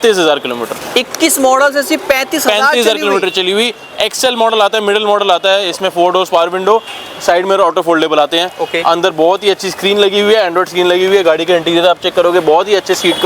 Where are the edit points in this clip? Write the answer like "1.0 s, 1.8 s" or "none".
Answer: none